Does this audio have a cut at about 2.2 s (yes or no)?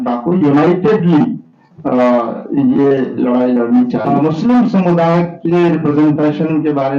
no